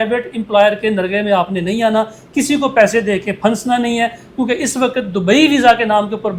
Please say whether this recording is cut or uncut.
uncut